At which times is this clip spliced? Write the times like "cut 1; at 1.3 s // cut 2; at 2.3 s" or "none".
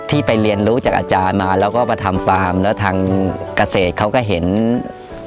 none